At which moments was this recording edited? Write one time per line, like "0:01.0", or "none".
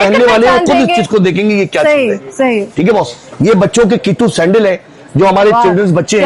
none